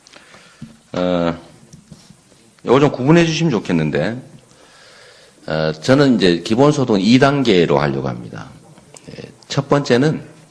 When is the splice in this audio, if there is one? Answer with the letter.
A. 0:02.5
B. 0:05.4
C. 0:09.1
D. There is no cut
A